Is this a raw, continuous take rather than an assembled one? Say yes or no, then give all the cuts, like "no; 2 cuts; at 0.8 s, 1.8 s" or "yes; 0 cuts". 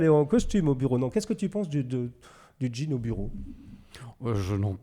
yes; 0 cuts